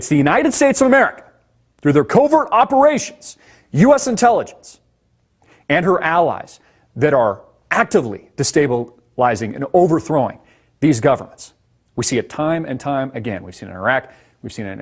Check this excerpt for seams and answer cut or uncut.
cut